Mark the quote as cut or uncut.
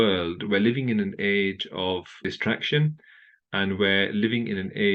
cut